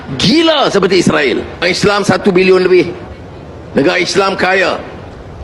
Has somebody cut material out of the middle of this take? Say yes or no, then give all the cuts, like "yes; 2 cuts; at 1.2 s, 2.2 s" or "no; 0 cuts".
yes; 1 cut; at 1.6 s